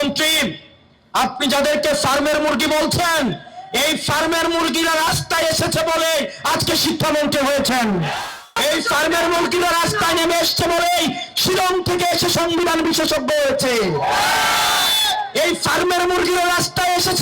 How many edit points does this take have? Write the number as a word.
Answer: one